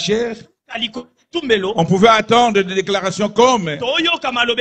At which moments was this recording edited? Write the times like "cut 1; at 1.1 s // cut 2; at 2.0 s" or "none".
none